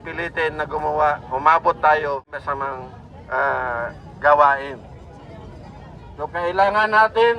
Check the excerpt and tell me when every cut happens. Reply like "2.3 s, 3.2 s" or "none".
2.3 s